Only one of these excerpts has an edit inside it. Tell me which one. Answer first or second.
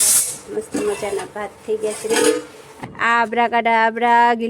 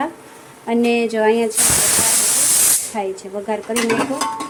first